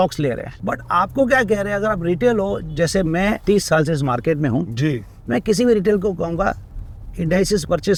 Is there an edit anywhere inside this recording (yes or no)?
no